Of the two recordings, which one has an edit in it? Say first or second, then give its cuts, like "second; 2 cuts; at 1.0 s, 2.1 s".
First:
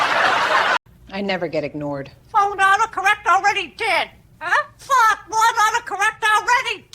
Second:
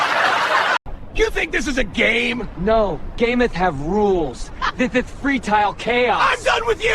first; 1 cut; at 1.0 s